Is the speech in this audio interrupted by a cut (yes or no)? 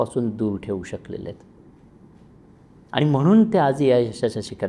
no